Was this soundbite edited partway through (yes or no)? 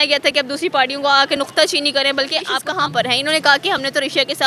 yes